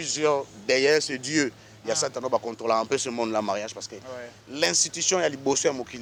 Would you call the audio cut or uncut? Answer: uncut